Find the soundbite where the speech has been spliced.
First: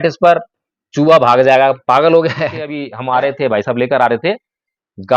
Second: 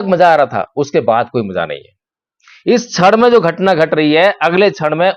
first; 1 cut; at 2.8 s

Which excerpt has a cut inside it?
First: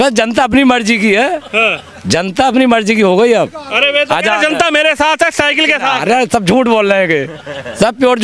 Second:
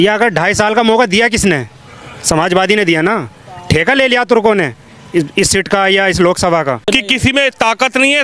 second; 1 cut; at 6.8 s

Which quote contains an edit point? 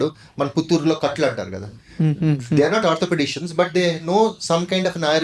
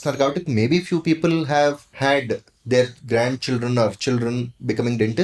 second; 1 cut; at 1.9 s

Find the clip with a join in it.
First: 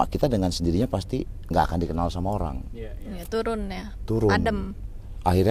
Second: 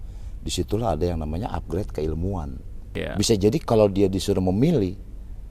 second; 1 cut; at 2.8 s

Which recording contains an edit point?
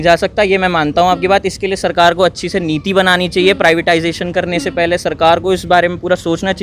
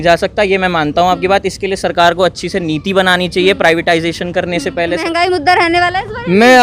second; 1 cut; at 5.0 s

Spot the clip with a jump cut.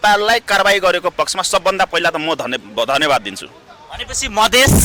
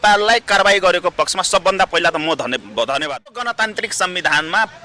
second; 1 cut; at 3.5 s

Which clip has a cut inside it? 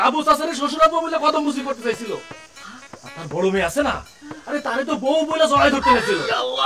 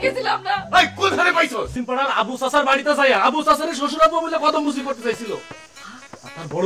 second; 1 cut; at 1.7 s

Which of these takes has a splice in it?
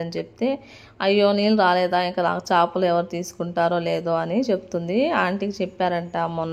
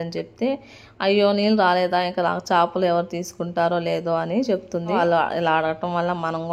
second; 1 cut; at 5.0 s

